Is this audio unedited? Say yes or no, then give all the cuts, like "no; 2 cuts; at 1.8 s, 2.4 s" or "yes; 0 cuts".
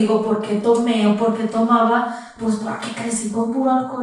yes; 0 cuts